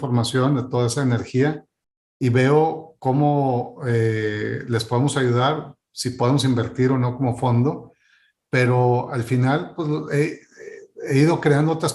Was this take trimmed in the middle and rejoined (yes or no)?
no